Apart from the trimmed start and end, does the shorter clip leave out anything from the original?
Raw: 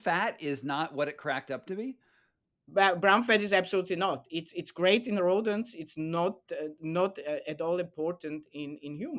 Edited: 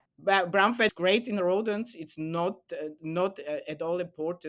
yes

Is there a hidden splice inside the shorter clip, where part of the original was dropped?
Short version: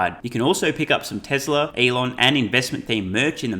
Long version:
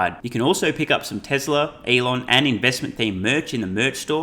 yes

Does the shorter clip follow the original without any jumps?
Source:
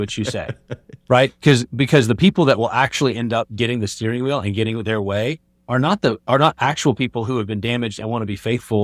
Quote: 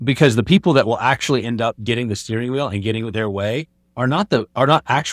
yes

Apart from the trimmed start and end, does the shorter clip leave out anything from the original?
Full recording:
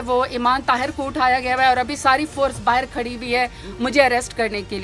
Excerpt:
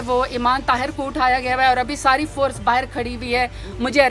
no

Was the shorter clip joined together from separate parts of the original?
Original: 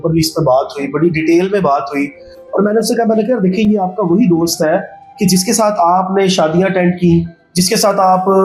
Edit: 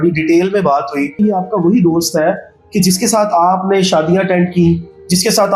yes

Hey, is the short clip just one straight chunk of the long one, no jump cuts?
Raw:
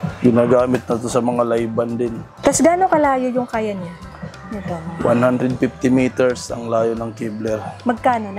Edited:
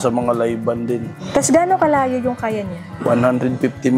no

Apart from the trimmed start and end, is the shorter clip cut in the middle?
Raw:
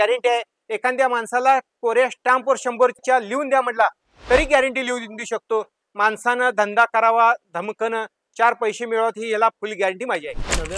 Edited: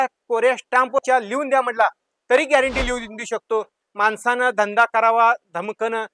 yes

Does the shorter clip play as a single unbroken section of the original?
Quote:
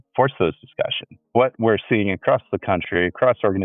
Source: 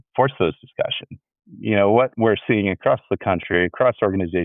no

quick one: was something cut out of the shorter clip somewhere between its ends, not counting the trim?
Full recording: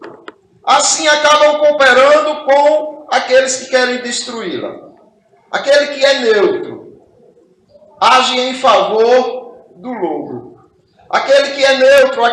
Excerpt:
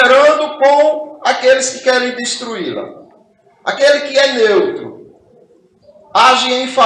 no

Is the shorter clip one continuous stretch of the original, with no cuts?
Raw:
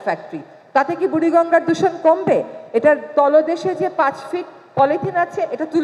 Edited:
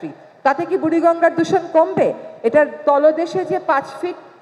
yes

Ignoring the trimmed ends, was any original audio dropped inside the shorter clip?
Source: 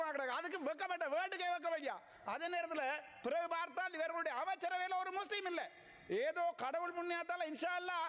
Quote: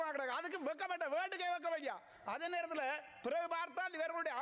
no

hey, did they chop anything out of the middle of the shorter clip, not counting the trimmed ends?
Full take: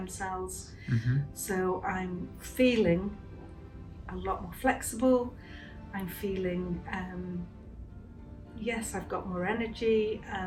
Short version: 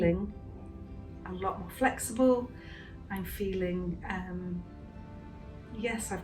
no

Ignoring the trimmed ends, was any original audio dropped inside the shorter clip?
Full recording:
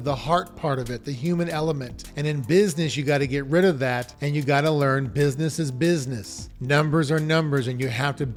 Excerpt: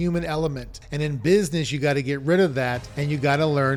no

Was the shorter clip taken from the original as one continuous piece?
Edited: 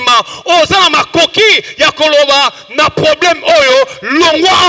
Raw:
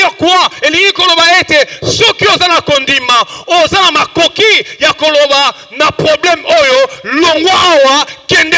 yes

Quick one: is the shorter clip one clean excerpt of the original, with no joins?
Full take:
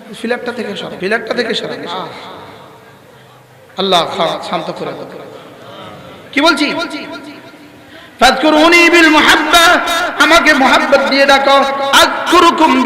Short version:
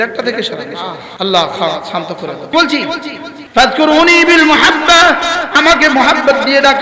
no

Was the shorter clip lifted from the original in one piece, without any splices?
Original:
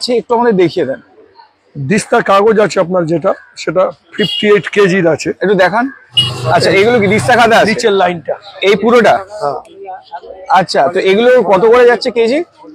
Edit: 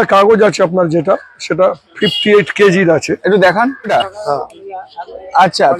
no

